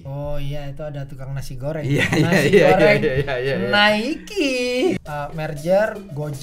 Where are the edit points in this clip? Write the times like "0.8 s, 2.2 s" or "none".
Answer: 5.0 s